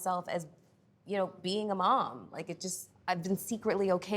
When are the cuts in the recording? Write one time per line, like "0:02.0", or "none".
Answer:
0:03.0